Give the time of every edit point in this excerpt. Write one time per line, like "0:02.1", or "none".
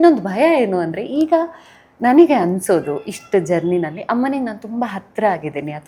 none